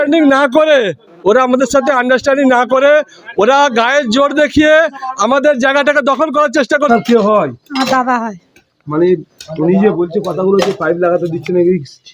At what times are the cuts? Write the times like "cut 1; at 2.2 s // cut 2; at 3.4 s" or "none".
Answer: cut 1; at 6.8 s